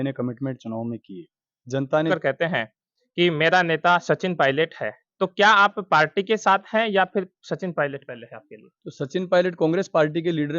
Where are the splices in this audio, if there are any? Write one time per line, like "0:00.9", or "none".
0:02.1